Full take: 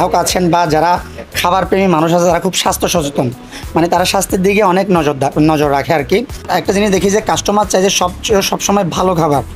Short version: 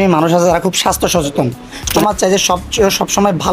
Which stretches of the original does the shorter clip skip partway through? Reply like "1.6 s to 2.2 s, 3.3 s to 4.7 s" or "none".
3.7 s to 7.5 s

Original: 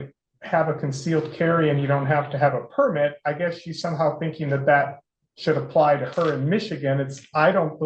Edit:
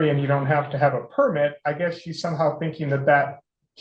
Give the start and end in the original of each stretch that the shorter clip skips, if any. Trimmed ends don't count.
none

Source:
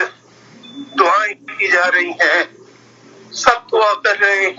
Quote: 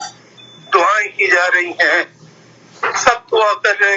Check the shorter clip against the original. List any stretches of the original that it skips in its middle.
1.3 s to 1.5 s

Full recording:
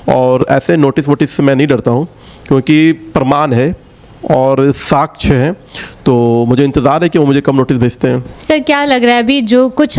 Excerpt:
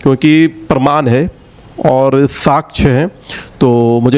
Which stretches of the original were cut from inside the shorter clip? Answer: none

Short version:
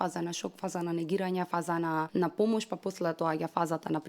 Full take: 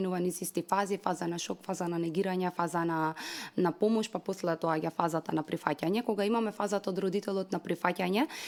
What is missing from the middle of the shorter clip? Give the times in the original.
2.8 s to 3.2 s

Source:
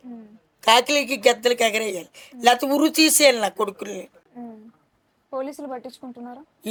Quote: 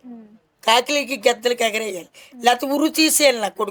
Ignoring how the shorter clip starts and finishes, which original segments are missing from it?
none

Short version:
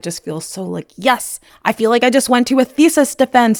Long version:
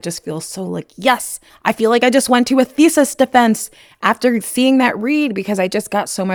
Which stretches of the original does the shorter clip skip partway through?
none

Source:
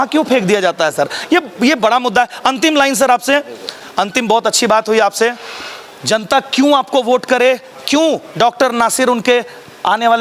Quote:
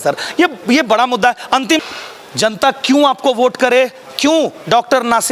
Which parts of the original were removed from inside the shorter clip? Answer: 2.7 s to 5.5 s

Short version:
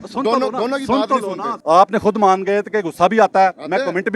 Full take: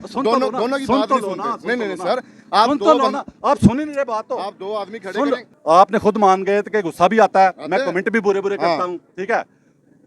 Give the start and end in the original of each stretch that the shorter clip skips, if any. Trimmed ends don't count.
1.5 s to 5.5 s

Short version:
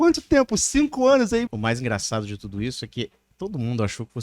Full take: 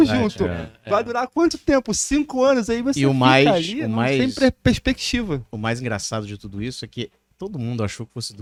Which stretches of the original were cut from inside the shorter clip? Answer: 2.8 s to 5.4 s

